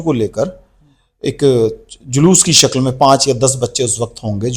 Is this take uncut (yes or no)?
yes